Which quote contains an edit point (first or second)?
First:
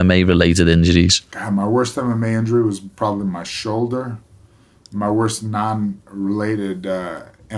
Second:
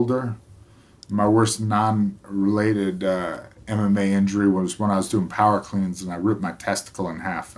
first